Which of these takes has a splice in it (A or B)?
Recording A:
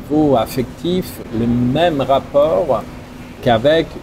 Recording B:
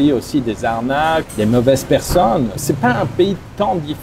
B